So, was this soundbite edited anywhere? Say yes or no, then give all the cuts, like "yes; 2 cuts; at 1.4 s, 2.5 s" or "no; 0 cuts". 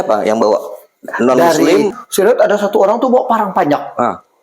yes; 1 cut; at 2.0 s